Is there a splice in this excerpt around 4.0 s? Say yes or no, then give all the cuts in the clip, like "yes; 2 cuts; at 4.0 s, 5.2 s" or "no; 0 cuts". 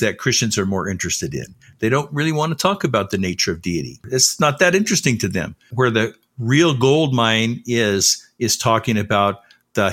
yes; 2 cuts; at 4.0 s, 5.7 s